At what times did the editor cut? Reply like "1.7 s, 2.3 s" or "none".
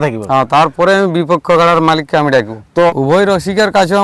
2.9 s